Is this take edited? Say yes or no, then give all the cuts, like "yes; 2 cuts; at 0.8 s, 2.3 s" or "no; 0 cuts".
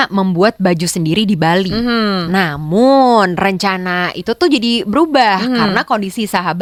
no; 0 cuts